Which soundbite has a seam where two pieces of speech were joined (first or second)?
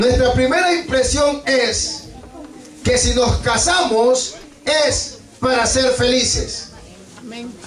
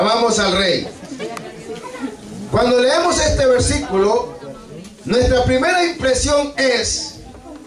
second